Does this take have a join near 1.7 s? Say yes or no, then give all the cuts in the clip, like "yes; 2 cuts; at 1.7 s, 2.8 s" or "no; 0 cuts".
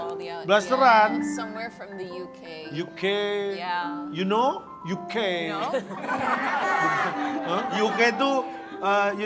no; 0 cuts